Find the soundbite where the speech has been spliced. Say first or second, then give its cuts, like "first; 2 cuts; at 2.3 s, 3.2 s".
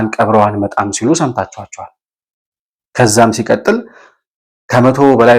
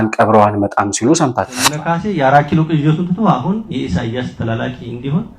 second; 1 cut; at 1.8 s